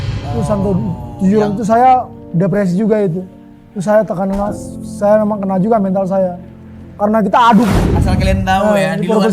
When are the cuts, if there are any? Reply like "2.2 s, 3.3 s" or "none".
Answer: 7.8 s